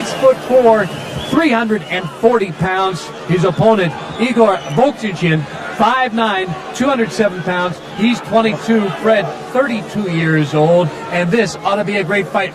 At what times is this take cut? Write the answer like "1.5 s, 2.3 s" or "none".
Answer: none